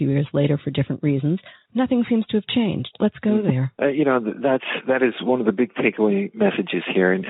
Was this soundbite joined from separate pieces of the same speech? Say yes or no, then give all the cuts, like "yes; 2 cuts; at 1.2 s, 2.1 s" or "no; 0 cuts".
yes; 3 cuts; at 1.6 s, 2.9 s, 3.7 s